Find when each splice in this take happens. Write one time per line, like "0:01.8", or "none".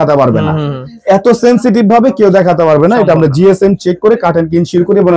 none